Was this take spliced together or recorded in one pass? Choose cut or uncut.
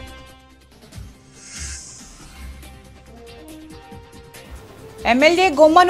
uncut